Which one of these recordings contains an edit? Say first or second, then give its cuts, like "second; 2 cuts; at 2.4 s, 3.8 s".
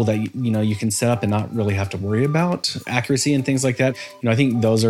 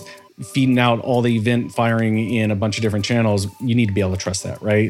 first; 2 cuts; at 2.8 s, 3.9 s